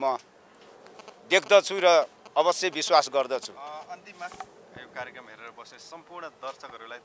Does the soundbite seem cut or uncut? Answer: uncut